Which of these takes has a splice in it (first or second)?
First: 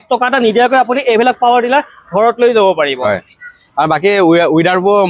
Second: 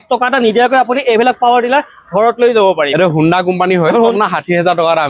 second